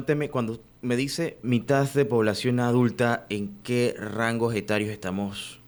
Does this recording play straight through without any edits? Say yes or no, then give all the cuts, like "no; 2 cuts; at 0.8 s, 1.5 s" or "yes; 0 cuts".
yes; 0 cuts